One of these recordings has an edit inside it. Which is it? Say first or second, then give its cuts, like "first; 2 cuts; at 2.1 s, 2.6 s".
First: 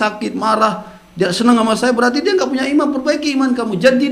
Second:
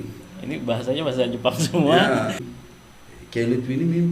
second; 1 cut; at 2.5 s